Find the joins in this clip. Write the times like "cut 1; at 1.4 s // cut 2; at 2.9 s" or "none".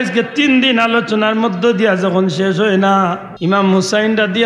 cut 1; at 3.3 s

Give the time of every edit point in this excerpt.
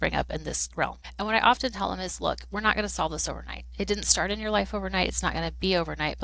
cut 1; at 1.0 s

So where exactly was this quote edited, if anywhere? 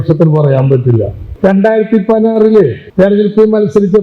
cut 1; at 1.2 s // cut 2; at 2.8 s

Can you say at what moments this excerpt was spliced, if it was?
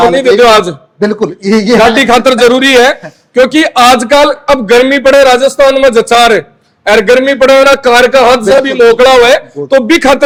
none

